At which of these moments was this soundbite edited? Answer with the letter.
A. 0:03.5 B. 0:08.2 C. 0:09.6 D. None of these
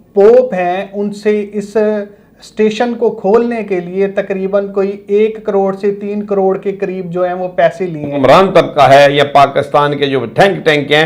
B